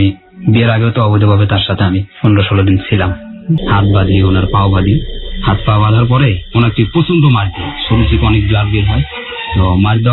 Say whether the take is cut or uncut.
cut